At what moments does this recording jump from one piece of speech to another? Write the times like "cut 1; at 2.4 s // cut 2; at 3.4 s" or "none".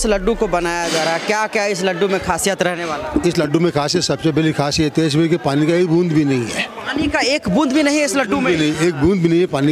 none

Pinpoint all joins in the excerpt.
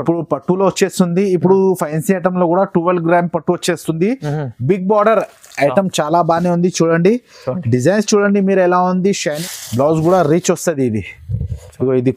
cut 1; at 9.4 s

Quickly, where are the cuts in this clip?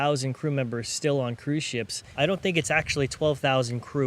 cut 1; at 2.1 s

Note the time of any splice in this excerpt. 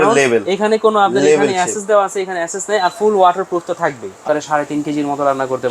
cut 1; at 4.2 s

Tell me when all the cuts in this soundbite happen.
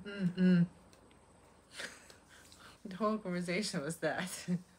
cut 1; at 2.7 s

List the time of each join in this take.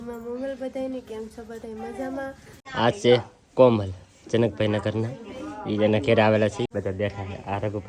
cut 1; at 2.7 s // cut 2; at 6.7 s

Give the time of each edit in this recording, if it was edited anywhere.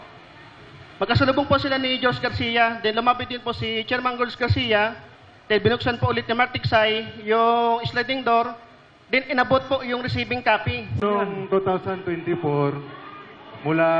cut 1; at 10.9 s

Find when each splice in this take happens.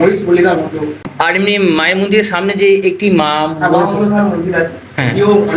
cut 1; at 1.1 s

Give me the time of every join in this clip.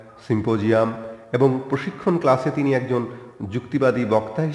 cut 1; at 3.6 s

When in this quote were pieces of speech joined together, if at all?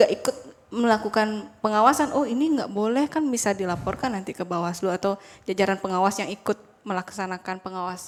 none

